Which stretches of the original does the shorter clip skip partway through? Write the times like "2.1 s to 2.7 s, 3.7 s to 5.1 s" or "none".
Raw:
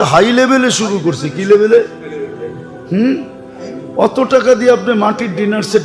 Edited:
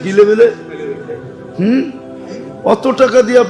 none

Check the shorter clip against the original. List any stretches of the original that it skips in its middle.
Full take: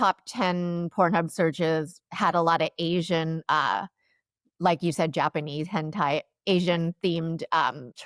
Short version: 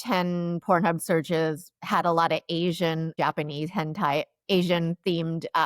3.4 s to 5.1 s

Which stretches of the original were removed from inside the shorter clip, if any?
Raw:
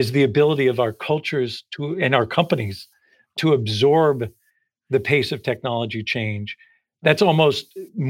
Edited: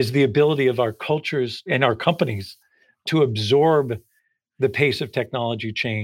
1.6 s to 1.9 s

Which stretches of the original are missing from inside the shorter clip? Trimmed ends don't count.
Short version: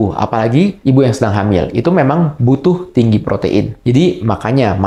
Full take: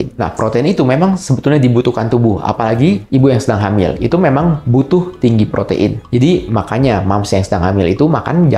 none

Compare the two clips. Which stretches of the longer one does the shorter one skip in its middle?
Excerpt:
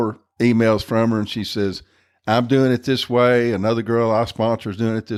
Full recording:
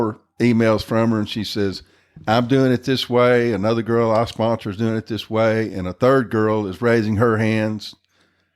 none

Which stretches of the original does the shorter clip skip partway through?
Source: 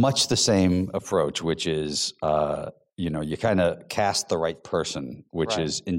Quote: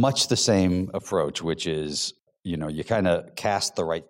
2.1 s to 2.7 s

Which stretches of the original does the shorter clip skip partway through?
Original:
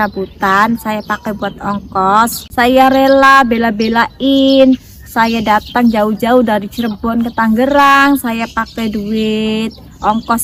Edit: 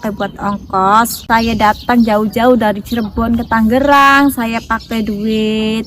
2.4 s to 5.0 s

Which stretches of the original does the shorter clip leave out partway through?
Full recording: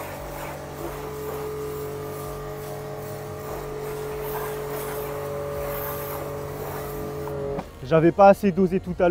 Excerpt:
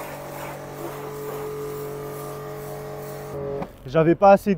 3.3 s to 7.3 s

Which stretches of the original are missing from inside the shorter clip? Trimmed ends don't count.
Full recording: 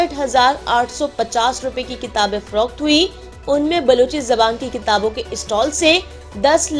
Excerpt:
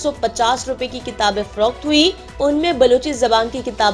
3.2 s to 3.3 s

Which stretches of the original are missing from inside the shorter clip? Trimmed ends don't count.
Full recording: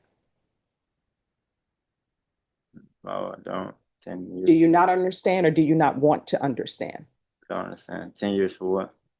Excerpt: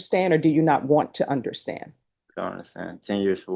none

